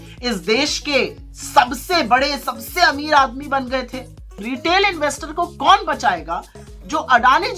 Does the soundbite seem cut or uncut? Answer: cut